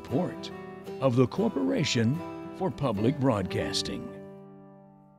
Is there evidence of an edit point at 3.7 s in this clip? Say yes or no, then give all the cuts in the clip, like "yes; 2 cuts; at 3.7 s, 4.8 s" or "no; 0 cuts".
yes; 1 cut; at 3.7 s